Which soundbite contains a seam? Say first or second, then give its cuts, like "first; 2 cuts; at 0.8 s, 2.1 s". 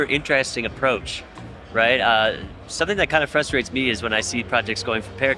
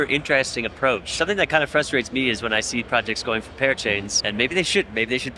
second; 2 cuts; at 1.1 s, 4.1 s